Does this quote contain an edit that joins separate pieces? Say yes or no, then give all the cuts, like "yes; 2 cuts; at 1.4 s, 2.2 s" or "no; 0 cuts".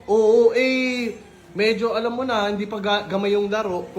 no; 0 cuts